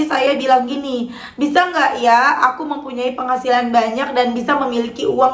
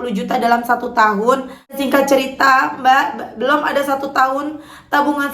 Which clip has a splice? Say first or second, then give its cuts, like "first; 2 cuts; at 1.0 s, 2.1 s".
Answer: second; 1 cut; at 1.8 s